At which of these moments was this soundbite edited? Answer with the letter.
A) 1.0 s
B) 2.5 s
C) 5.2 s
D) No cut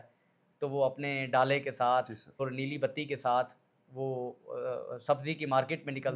B